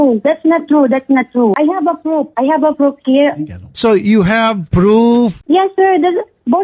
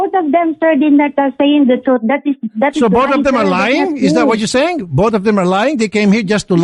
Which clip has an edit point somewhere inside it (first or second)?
first